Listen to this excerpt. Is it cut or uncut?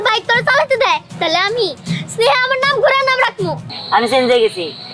cut